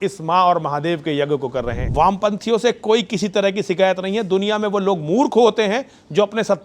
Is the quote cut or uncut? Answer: cut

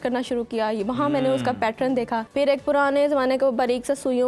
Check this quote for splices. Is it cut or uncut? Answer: cut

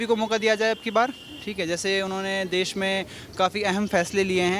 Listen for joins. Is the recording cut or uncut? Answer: uncut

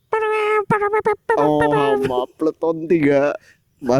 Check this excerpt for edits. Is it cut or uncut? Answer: uncut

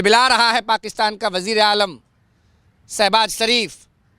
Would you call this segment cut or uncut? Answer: uncut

